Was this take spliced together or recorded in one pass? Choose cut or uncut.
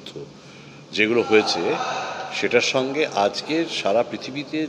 uncut